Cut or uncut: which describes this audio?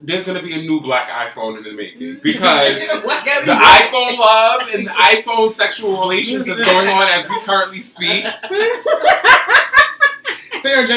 cut